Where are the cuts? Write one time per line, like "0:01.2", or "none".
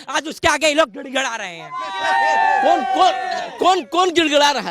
none